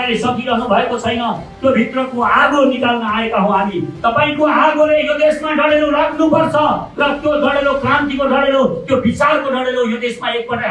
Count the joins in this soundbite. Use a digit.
0